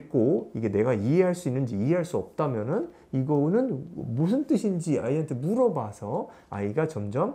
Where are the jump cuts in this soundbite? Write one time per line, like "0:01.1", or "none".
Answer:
none